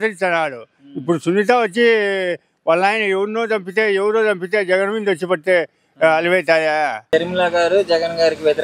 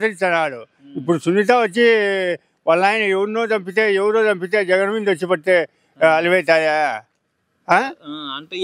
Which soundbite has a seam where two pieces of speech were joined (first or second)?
first